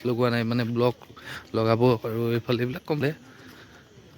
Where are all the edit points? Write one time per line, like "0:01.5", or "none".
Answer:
0:03.0

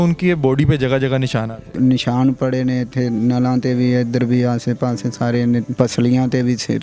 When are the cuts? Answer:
0:01.7
0:05.7

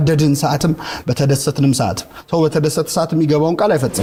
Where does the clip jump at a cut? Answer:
none

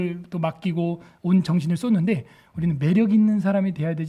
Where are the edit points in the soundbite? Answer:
none

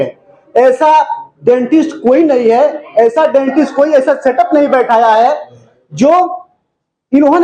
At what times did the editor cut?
none

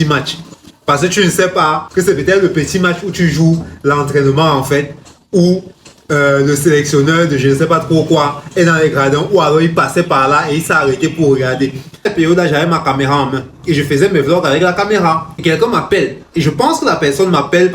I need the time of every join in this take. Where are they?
0:01.8
0:12.1
0:15.3

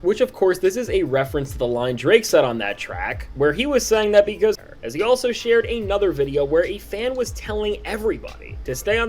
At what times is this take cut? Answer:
0:04.6

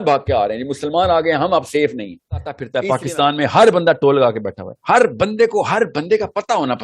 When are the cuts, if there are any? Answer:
0:02.7

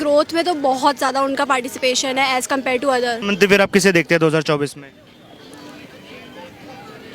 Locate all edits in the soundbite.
0:03.2

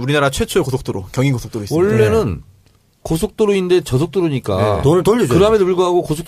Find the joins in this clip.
none

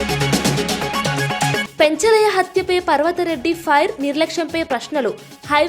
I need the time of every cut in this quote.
0:01.6

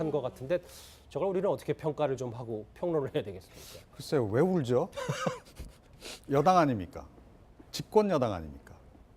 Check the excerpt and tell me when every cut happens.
0:07.7

